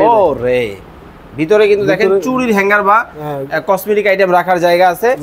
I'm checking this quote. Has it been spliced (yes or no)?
no